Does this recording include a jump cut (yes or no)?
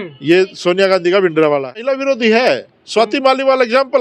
yes